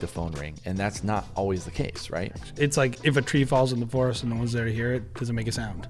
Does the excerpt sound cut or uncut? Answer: cut